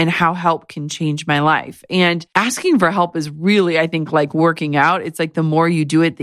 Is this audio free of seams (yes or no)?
no